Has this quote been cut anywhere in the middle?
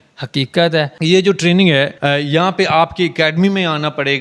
yes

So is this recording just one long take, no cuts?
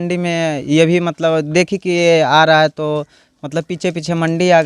yes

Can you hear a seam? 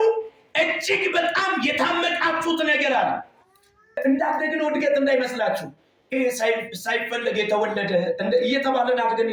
yes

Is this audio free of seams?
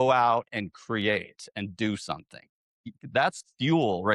no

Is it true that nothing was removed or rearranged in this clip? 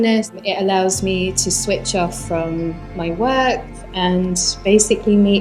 yes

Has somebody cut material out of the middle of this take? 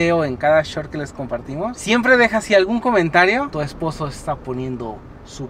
yes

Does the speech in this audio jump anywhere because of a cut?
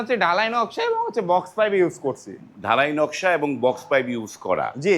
no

